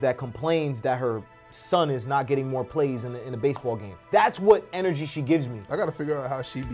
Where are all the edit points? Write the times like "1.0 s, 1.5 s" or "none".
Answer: none